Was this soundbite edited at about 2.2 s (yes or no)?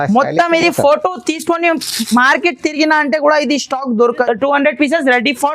no